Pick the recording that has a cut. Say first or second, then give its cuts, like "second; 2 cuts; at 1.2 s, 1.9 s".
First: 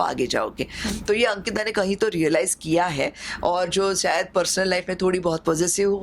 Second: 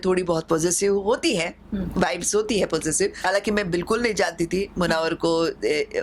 second; 1 cut; at 3.2 s